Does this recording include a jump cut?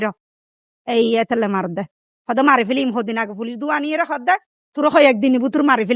no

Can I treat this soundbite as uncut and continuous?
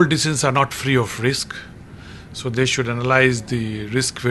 yes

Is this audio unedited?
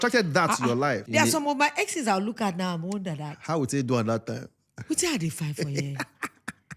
no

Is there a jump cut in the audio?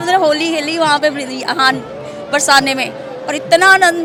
no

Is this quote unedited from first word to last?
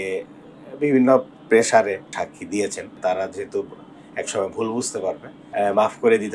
no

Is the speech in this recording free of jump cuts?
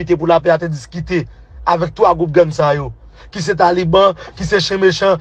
yes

